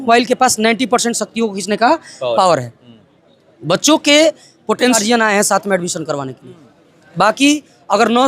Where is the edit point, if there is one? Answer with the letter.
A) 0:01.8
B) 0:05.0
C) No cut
B